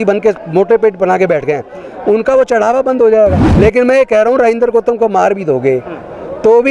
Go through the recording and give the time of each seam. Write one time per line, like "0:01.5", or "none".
0:03.4